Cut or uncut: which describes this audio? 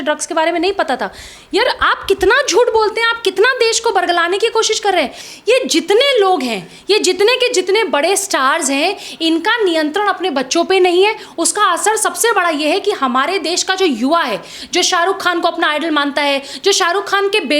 cut